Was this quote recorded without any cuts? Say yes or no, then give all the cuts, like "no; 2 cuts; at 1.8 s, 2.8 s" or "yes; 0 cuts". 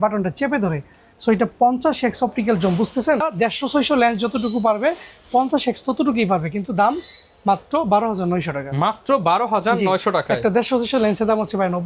yes; 0 cuts